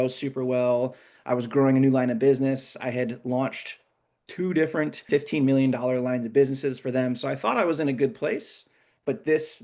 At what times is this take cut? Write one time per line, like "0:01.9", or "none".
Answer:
0:05.1